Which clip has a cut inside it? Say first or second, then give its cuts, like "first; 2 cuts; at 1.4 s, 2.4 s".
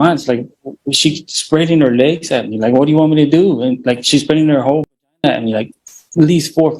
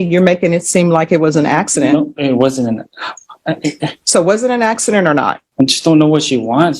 second; 1 cut; at 5.4 s